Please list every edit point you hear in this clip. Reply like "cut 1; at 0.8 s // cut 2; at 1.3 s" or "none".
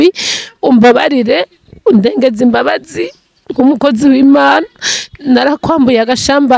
none